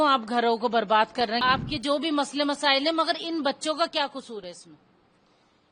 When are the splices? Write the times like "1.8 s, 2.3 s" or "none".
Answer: 1.4 s